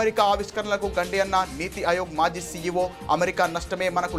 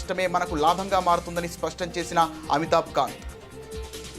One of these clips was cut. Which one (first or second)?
second